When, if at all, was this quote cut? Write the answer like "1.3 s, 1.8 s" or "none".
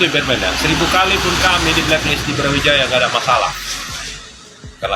none